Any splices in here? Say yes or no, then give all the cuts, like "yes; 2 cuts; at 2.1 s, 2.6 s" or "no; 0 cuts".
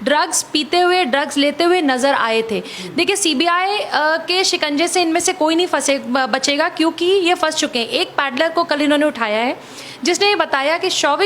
no; 0 cuts